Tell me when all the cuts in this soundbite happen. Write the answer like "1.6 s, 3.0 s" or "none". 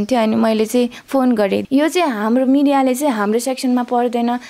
1.6 s